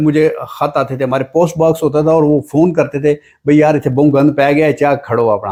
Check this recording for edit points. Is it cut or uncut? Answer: uncut